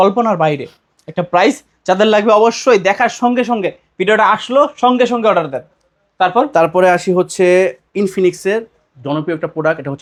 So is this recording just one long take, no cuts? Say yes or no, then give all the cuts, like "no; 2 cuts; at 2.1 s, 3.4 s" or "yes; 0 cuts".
yes; 0 cuts